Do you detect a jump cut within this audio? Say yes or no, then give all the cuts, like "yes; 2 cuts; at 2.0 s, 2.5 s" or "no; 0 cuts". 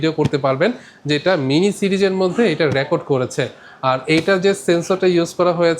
no; 0 cuts